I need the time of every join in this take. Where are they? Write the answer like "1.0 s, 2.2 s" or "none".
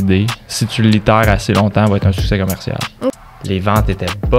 3.1 s